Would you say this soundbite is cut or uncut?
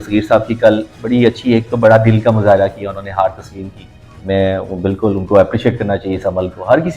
uncut